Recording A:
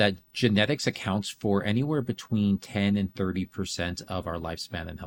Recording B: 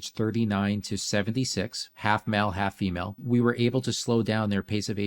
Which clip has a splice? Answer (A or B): B